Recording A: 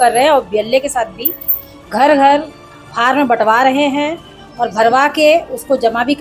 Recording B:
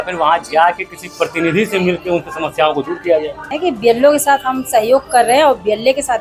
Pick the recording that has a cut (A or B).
B